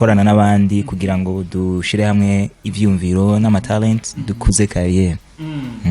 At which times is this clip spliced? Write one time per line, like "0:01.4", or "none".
none